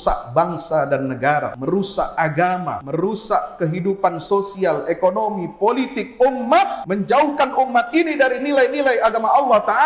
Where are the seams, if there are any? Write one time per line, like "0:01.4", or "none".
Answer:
0:01.5
0:02.8
0:06.8